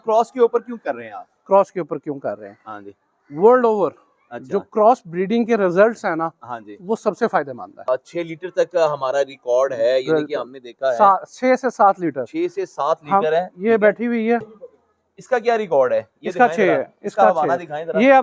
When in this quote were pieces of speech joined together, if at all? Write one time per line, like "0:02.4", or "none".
0:07.8
0:14.5